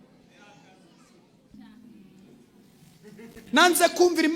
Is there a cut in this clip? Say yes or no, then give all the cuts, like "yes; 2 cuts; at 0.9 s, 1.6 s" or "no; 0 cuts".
yes; 1 cut; at 1.5 s